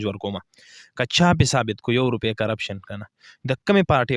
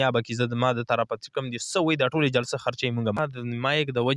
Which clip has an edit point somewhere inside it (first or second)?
second